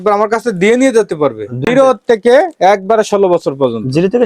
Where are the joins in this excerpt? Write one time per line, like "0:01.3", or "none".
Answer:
0:01.6